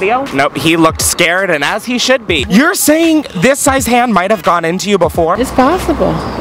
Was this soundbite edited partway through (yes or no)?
yes